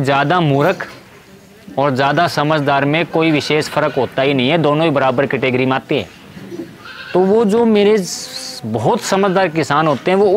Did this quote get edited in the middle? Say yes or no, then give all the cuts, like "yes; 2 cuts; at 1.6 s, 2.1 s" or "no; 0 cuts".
no; 0 cuts